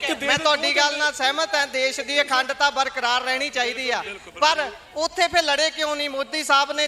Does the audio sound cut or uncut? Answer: uncut